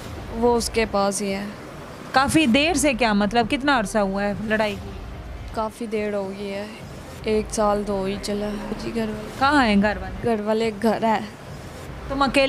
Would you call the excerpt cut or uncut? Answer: cut